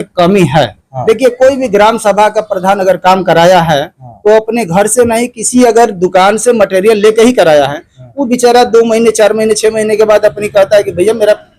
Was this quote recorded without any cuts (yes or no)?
yes